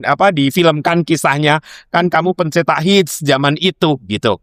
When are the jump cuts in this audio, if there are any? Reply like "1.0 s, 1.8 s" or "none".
none